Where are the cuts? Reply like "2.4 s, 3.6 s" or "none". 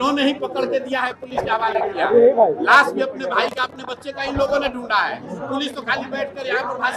none